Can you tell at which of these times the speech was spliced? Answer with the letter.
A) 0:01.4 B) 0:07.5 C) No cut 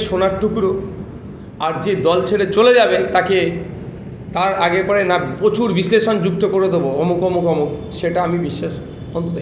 C